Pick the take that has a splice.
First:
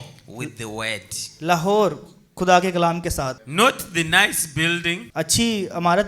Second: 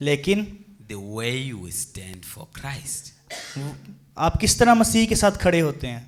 first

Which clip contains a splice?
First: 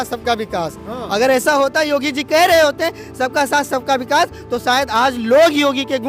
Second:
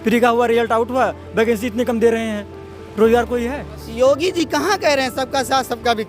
second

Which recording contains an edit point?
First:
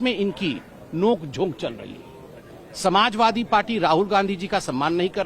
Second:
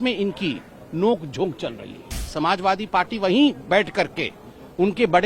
second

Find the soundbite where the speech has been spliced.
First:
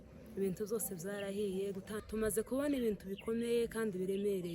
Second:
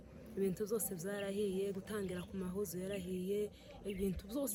first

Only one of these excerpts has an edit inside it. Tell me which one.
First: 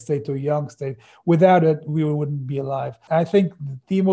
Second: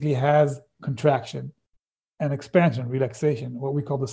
first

